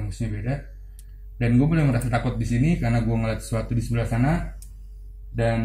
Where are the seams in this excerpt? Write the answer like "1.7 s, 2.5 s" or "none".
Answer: 1.2 s

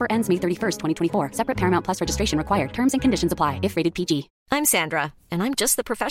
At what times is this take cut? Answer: 4.3 s

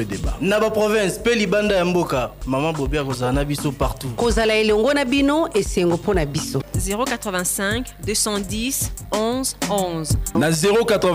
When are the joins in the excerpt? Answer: none

